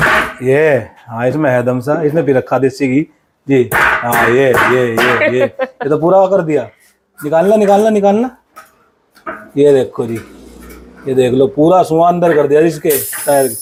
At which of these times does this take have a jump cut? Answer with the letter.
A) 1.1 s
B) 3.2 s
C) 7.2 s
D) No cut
D